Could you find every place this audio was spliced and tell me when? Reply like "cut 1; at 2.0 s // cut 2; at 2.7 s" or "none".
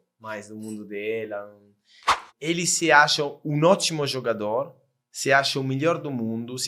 cut 1; at 2.2 s